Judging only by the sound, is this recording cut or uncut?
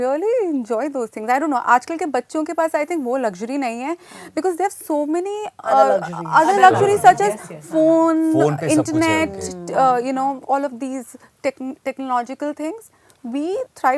uncut